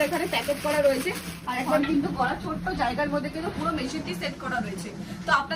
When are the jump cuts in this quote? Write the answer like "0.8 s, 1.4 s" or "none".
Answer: 1.7 s

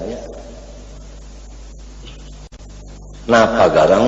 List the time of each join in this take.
2.5 s

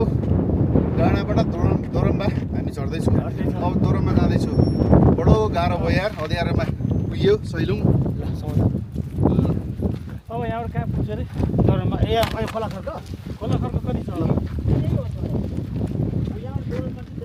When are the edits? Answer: none

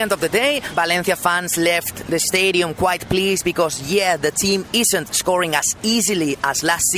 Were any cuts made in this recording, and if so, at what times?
none

